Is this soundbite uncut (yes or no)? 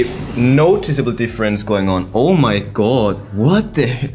yes